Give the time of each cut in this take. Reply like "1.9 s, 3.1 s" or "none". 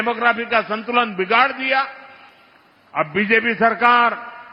none